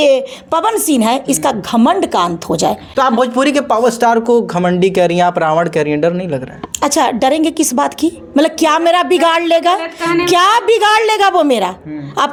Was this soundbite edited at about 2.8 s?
no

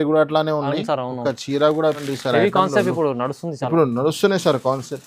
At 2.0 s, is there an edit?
yes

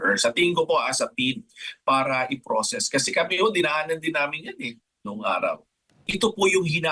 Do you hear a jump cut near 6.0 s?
yes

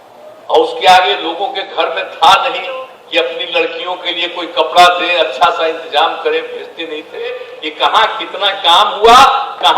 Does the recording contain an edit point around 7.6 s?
yes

